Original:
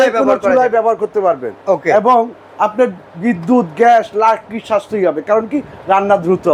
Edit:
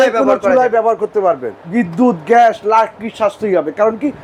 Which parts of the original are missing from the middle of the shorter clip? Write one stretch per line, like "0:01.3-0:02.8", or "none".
0:01.5-0:03.0